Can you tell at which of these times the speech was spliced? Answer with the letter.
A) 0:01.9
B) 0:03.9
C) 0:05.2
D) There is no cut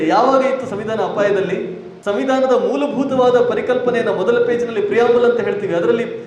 A